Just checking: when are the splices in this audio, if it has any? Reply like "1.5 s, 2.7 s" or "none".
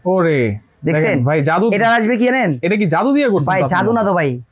none